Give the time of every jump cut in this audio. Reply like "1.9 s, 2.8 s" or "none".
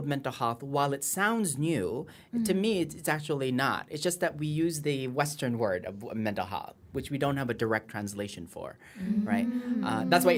none